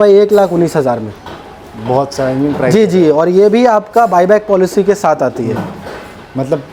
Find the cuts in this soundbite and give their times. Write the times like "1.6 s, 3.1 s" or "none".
none